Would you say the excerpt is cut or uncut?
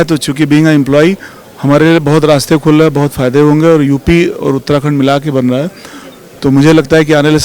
uncut